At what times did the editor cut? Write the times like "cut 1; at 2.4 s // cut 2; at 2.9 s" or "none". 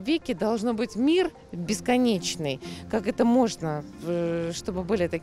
none